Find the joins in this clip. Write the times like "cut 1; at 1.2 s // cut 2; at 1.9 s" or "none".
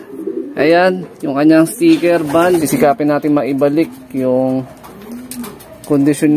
cut 1; at 2.6 s